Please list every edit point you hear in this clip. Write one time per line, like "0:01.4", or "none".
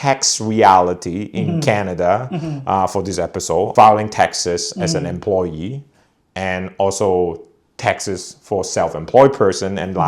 0:03.7